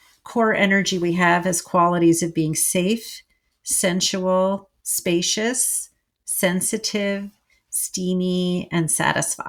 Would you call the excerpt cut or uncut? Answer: uncut